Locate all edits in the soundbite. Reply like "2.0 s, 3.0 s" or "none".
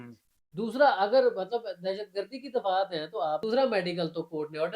3.4 s